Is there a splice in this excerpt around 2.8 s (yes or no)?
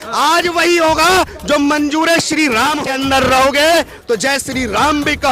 yes